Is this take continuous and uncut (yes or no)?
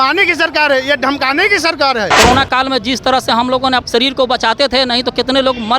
no